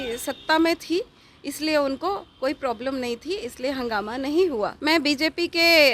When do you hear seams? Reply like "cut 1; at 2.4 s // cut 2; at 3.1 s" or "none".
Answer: cut 1; at 4.8 s